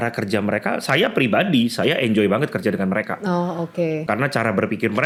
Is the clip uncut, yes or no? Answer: yes